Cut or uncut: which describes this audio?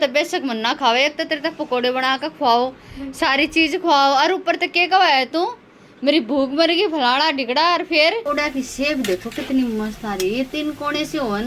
cut